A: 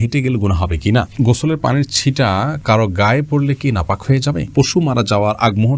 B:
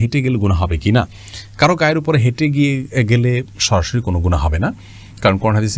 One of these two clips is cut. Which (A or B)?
A